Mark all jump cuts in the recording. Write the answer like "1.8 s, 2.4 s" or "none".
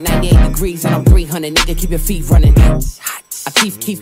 2.0 s